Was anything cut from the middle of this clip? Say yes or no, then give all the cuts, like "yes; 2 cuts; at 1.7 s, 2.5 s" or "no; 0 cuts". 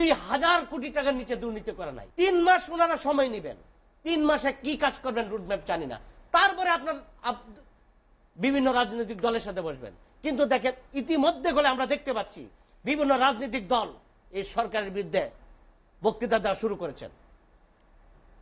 yes; 1 cut; at 2.0 s